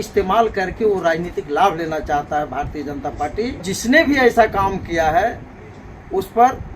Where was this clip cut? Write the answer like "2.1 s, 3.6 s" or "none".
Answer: 3.7 s